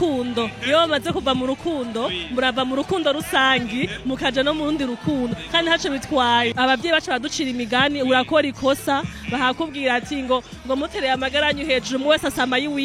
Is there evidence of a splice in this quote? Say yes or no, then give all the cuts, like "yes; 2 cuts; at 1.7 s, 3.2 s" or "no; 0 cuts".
yes; 1 cut; at 6.5 s